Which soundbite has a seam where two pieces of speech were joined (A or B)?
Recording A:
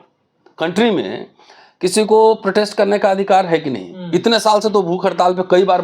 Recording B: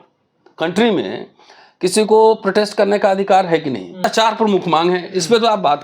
B